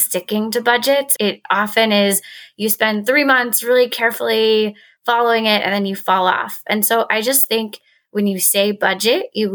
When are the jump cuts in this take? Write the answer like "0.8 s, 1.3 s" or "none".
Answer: 1.1 s